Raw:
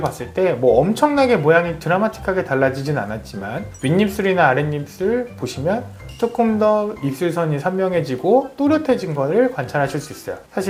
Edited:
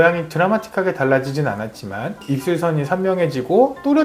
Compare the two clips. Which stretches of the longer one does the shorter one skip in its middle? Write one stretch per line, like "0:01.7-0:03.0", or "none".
0:03.7-0:07.0